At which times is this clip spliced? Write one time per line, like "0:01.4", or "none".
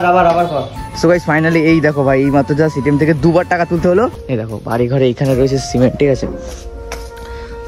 0:04.2